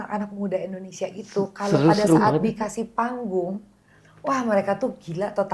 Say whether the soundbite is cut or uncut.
uncut